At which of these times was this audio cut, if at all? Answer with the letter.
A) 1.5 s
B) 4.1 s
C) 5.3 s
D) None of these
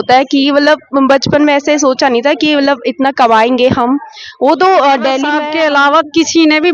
C